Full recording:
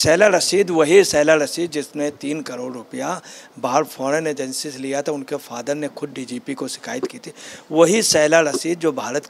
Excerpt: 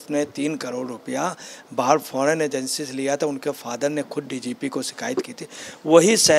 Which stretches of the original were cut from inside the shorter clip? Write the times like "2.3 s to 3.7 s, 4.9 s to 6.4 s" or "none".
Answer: none